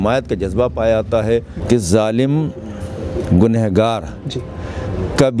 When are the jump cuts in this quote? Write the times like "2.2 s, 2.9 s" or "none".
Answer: 1.5 s

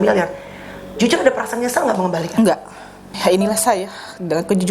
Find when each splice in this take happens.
3.2 s

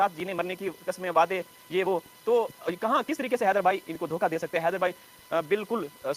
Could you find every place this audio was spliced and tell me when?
none

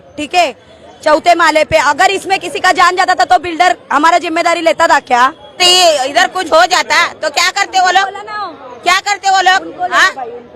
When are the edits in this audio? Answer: 5.6 s

